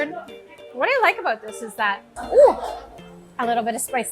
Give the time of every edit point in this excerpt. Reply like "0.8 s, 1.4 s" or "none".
2.1 s